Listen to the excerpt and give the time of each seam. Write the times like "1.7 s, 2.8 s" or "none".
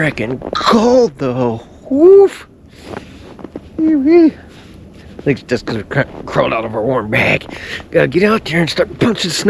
none